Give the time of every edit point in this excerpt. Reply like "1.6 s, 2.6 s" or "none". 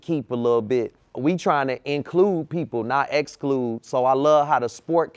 1.0 s

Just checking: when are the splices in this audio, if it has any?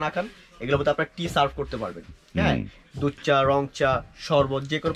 none

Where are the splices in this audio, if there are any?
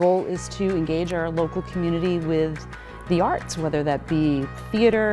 none

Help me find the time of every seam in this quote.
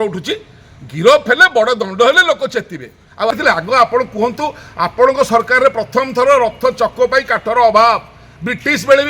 3.4 s

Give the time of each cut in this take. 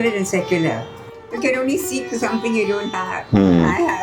1.1 s

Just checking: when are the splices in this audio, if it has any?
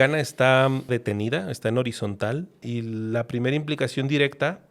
0.9 s, 2.6 s

